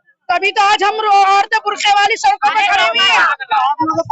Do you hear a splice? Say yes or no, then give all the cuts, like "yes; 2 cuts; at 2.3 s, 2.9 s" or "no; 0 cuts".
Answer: yes; 1 cut; at 3.2 s